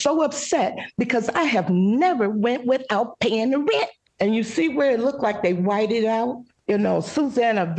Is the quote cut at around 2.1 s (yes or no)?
no